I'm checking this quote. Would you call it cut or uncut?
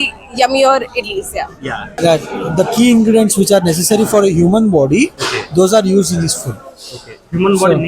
cut